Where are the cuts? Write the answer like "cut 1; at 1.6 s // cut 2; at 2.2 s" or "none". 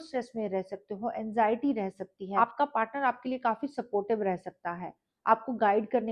cut 1; at 2.2 s